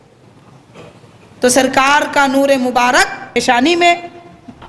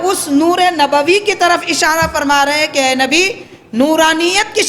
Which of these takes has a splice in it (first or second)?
first